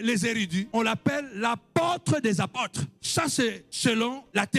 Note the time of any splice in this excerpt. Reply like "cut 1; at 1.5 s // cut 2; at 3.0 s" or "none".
none